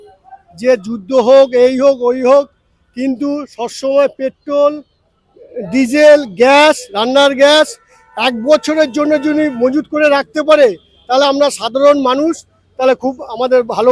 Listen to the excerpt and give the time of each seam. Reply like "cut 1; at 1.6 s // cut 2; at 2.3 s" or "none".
none